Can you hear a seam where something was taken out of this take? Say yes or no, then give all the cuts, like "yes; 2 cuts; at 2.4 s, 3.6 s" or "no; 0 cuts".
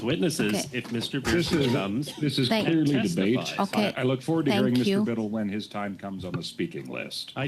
yes; 1 cut; at 2.1 s